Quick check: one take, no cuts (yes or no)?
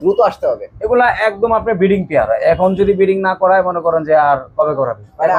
yes